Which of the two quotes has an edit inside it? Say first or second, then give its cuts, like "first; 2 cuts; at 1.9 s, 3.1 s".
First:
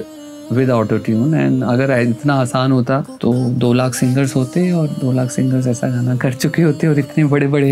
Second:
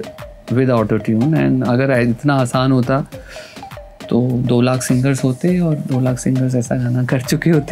first; 1 cut; at 3.1 s